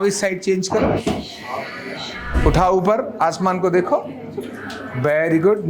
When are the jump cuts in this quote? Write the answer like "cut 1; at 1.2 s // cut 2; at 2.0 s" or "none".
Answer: cut 1; at 2.3 s